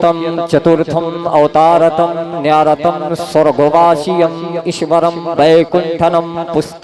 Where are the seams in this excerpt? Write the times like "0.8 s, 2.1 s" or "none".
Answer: none